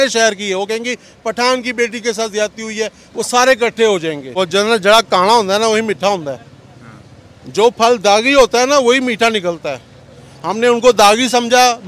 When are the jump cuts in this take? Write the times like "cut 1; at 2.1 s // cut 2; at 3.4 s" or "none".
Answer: cut 1; at 4.4 s